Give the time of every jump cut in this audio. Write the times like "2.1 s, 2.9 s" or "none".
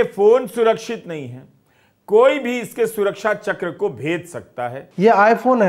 4.8 s